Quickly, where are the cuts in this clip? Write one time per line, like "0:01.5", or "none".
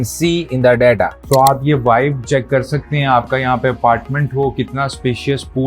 0:01.2